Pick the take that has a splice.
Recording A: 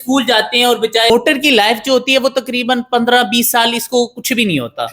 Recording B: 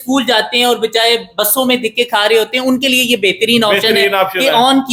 A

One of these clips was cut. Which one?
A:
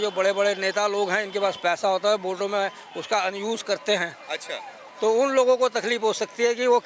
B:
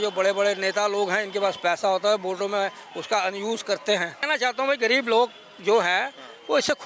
B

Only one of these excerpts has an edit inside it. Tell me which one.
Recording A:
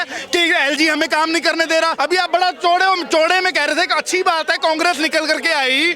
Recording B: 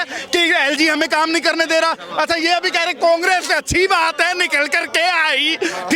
A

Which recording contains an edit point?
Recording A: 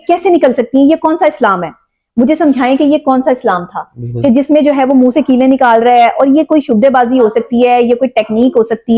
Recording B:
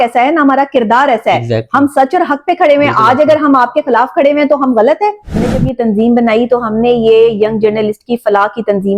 B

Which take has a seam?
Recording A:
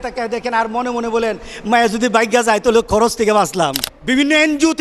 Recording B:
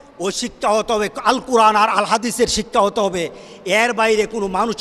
A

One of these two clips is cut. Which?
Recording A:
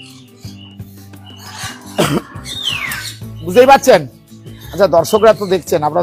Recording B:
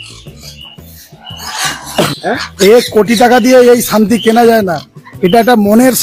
B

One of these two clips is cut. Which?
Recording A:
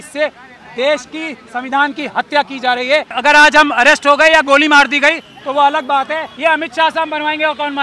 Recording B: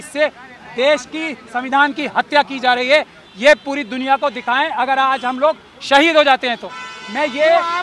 A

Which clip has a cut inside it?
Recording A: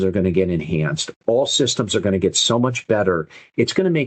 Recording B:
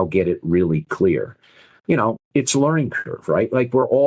B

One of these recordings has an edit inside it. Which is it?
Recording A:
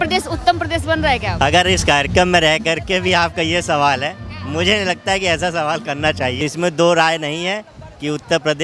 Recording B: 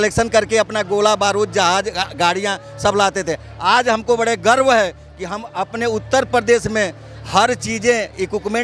A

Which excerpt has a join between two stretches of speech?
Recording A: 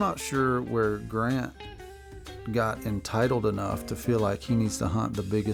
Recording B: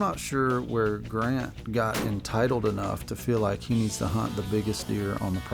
B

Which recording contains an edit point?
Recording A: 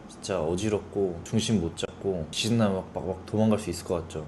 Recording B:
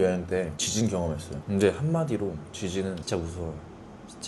B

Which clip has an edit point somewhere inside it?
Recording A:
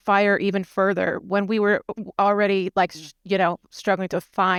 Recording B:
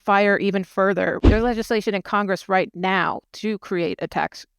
B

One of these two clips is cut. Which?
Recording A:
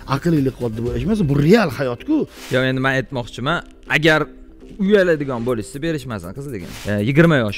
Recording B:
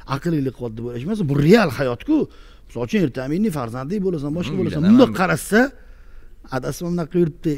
A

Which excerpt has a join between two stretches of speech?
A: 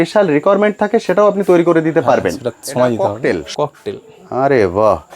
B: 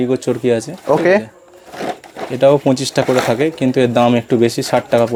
A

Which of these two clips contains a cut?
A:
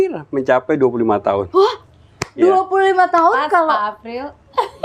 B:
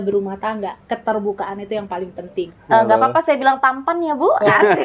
B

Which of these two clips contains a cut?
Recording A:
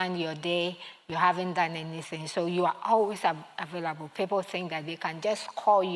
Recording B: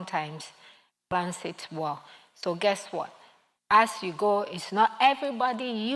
B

